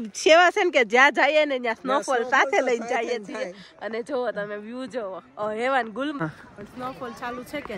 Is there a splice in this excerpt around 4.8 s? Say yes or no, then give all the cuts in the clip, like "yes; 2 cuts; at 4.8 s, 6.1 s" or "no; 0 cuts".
no; 1 cut; at 6.2 s